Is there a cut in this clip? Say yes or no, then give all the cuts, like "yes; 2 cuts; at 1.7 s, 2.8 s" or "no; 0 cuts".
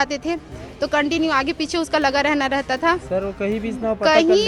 no; 0 cuts